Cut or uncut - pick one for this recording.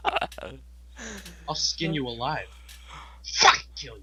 uncut